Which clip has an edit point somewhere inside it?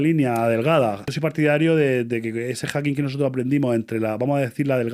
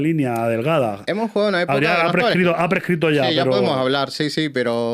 first; 1 cut; at 1.0 s

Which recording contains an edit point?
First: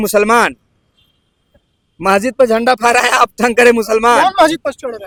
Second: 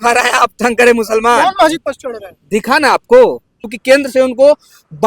second; 1 cut; at 3.7 s

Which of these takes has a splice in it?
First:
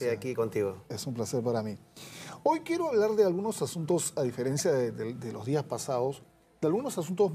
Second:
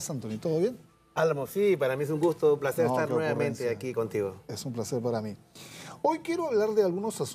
first; 1 cut; at 5.9 s

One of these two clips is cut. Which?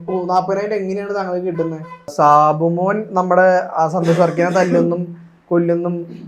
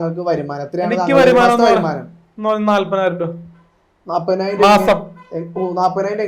first; 1 cut; at 2.1 s

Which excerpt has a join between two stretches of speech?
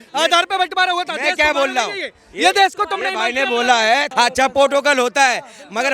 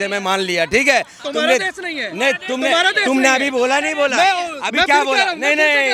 first; 1 cut; at 4.1 s

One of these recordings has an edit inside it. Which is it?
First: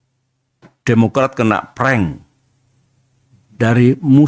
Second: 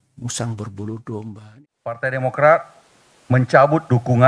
second; 1 cut; at 1.4 s

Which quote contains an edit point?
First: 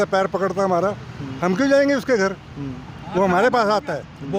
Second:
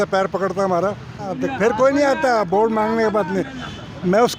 second; 1 cut; at 1.2 s

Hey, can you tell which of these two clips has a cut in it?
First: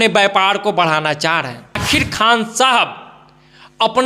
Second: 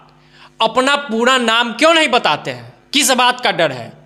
first; 1 cut; at 1.8 s

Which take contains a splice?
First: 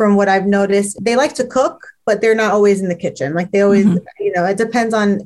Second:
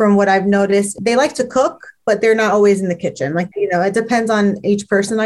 second; 1 cut; at 3.5 s

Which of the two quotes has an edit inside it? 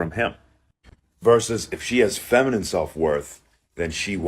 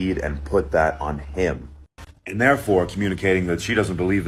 first; 1 cut; at 2.0 s

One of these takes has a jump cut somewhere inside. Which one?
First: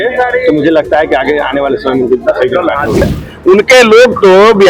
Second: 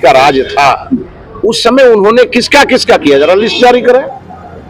first; 1 cut; at 3.2 s

